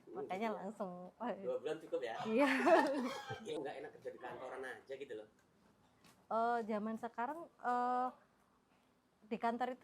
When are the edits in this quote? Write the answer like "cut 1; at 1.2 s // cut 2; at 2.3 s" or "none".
none